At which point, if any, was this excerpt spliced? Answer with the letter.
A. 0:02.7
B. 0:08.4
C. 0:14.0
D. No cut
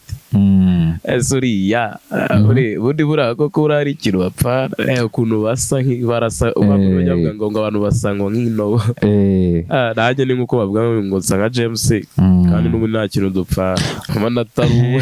C